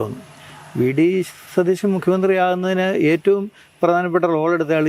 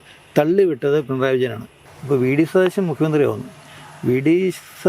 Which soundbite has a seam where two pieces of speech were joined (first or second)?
second